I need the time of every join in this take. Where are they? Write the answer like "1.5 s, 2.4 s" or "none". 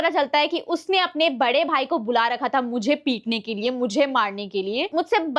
none